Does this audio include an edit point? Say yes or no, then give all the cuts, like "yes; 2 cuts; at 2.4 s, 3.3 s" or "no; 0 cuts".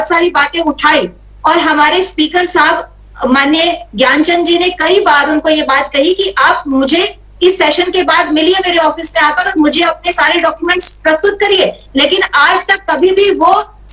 no; 0 cuts